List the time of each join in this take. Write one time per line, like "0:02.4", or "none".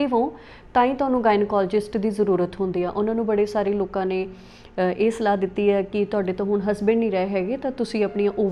none

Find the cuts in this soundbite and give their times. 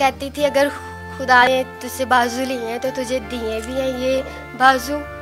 0:01.4

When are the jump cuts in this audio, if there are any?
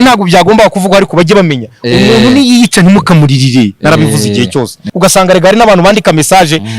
0:04.8

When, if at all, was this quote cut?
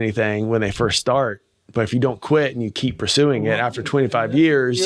none

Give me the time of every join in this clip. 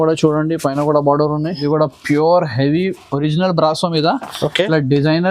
0:01.6

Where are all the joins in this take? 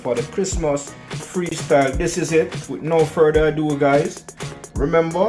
0:01.4

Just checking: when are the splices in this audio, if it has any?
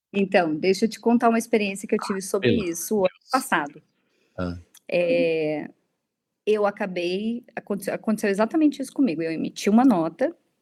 none

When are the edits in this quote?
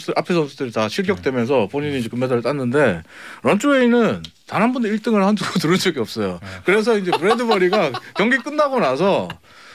none

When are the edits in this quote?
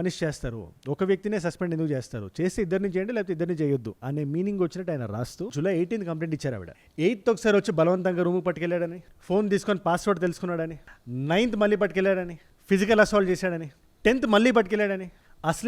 0:05.5

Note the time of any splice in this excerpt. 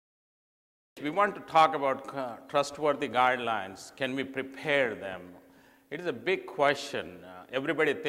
none

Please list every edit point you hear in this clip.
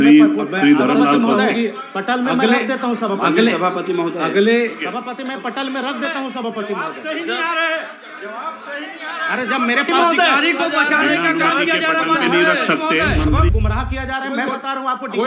0:13.5

